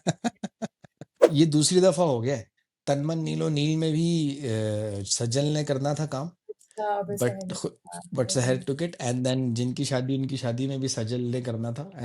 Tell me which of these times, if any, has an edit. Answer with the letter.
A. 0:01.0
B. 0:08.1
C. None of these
A